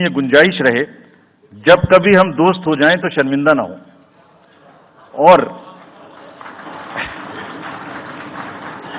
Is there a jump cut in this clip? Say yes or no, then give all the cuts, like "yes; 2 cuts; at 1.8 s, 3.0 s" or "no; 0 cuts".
no; 0 cuts